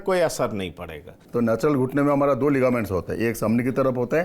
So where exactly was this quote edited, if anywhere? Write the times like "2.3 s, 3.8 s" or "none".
1.2 s